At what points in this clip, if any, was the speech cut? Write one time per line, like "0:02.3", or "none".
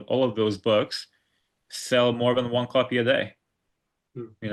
none